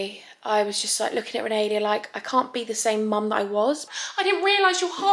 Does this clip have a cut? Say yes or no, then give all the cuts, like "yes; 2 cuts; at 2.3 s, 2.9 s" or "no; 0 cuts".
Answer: yes; 1 cut; at 4.0 s